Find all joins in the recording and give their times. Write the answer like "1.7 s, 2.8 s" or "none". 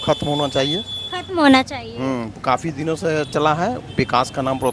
none